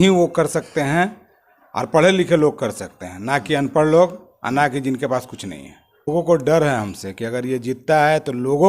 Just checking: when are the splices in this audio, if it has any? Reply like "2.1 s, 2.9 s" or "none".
6.1 s